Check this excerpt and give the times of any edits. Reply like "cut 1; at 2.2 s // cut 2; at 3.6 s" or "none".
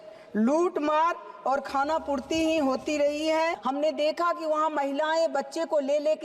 cut 1; at 3.6 s